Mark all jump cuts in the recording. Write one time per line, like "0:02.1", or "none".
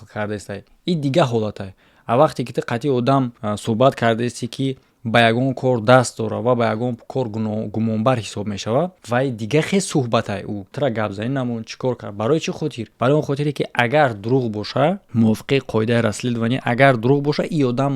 0:03.4
0:09.0
0:10.7
0:12.8
0:15.0